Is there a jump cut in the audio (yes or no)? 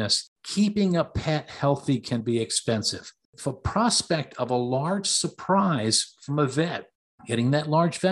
yes